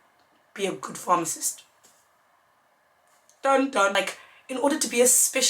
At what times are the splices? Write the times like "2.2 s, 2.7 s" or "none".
4.0 s